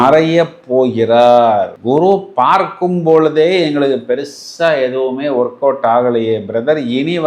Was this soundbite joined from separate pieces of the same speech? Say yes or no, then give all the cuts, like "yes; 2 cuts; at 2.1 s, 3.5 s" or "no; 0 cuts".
no; 0 cuts